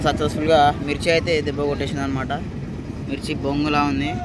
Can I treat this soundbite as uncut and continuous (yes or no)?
yes